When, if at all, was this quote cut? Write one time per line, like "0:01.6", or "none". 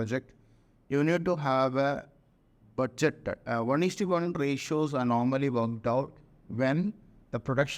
0:03.4